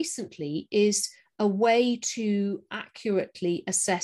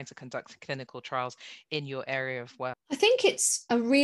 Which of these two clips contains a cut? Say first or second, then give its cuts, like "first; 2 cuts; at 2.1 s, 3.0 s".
second; 1 cut; at 2.7 s